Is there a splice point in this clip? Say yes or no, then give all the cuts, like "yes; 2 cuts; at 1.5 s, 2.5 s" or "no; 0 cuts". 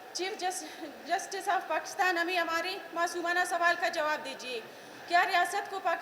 no; 0 cuts